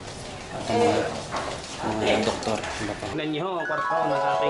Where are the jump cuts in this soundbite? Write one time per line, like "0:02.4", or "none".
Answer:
0:03.2